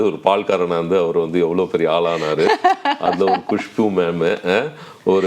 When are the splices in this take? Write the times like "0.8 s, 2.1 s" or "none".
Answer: none